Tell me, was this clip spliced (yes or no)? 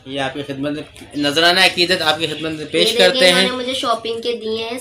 no